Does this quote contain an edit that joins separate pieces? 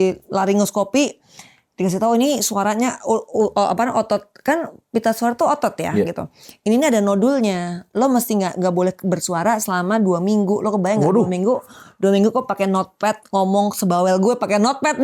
no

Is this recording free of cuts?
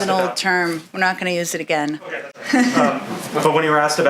yes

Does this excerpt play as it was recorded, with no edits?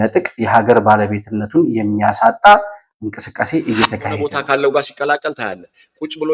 no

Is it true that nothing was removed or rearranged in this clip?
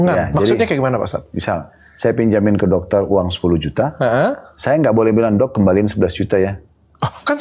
yes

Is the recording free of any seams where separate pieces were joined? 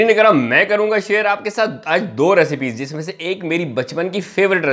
yes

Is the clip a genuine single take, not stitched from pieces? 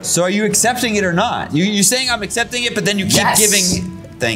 yes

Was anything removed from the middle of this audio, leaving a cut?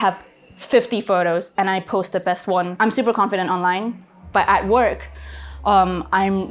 yes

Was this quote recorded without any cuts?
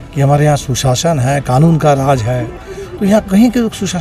yes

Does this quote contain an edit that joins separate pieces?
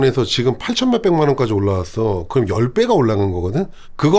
no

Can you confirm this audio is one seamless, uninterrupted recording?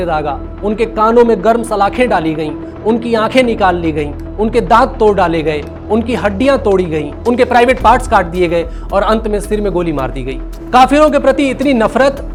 yes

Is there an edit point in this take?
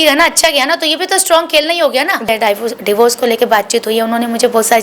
yes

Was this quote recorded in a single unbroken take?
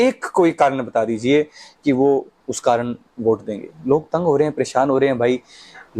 yes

